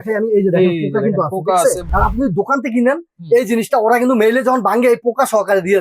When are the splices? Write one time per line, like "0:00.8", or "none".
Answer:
0:01.8